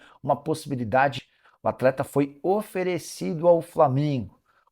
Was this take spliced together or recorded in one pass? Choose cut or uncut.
cut